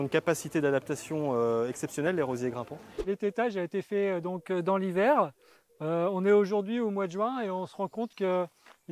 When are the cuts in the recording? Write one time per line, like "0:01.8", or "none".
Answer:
0:03.0